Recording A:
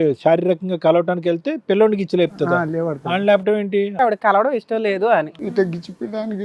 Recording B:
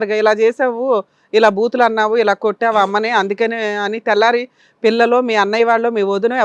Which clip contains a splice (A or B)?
A